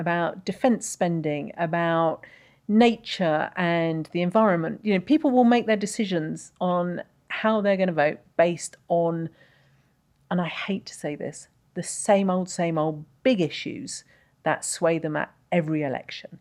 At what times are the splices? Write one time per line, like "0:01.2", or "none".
none